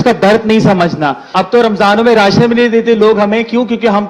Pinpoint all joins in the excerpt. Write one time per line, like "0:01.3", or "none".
0:01.2